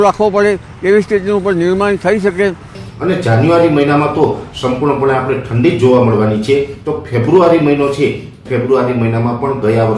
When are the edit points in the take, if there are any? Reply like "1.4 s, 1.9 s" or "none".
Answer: 2.8 s